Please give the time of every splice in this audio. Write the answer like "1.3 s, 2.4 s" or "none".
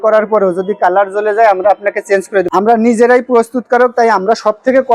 2.5 s